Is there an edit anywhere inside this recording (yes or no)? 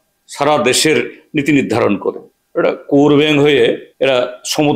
yes